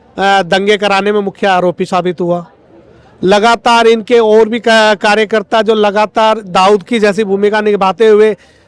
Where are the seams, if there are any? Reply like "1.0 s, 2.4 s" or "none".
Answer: none

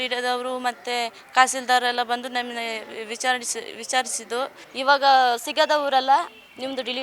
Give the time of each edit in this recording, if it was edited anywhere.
4.6 s

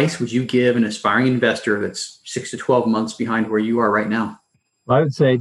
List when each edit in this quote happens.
none

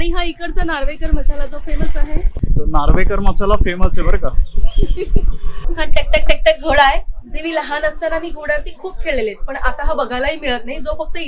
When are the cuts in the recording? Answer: 5.4 s

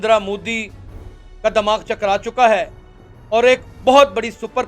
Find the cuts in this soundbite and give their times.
none

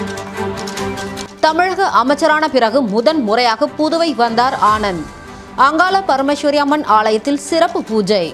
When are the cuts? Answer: 0.9 s

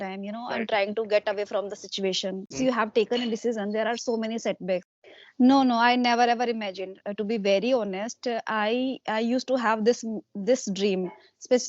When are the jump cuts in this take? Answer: 2.5 s, 4.9 s

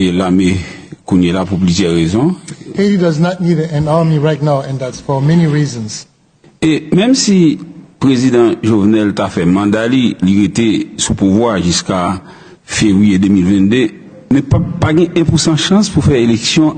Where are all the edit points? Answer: 2.5 s

